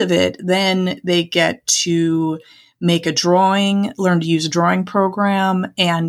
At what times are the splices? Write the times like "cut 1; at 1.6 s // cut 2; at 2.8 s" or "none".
none

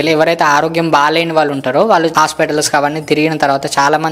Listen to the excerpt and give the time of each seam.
cut 1; at 2.1 s

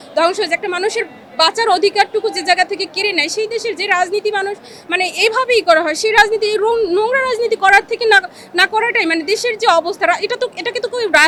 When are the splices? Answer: none

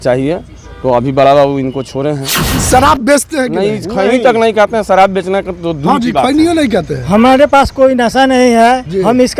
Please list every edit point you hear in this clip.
cut 1; at 2.6 s

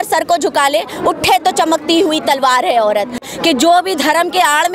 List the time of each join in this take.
cut 1; at 3.3 s

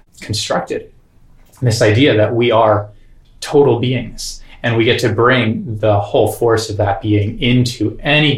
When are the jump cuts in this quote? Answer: none

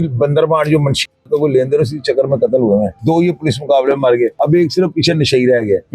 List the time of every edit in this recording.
cut 1; at 2.9 s // cut 2; at 4.3 s

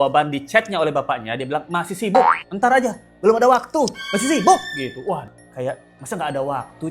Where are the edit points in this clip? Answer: cut 1; at 5.3 s

